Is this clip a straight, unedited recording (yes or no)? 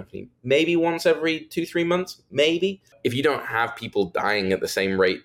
no